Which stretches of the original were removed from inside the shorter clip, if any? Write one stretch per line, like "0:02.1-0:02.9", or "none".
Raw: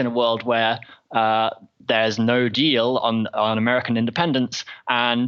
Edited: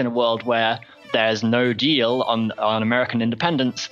0:00.9-0:01.7